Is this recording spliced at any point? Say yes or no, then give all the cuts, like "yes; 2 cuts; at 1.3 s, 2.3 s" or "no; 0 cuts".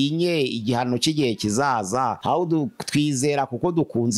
yes; 1 cut; at 2.2 s